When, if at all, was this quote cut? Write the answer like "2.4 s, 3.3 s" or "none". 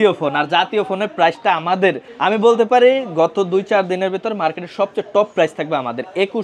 2.1 s

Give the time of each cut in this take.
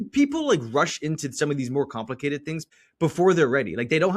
2.7 s

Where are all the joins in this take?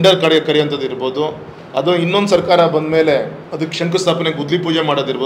3.4 s

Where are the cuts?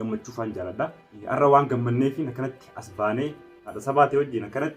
1.1 s, 3.7 s

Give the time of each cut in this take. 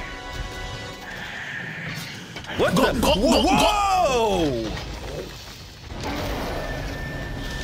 none

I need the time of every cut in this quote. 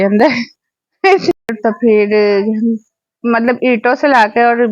1.4 s

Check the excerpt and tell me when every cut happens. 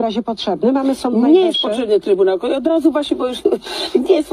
none

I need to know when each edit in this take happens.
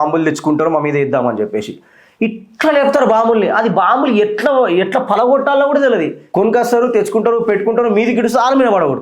6.2 s

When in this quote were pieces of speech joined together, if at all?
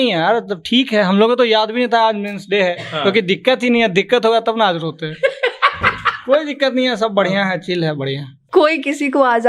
8.4 s

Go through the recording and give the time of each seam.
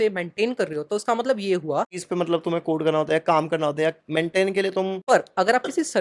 2.0 s, 5.0 s

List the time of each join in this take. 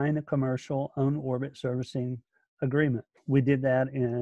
3.2 s

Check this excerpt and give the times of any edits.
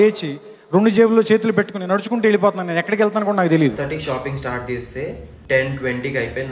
3.8 s

